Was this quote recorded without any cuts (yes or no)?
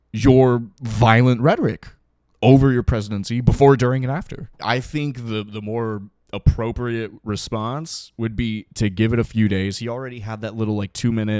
no